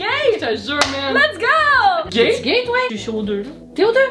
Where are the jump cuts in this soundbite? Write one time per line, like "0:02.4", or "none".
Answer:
0:02.1
0:03.1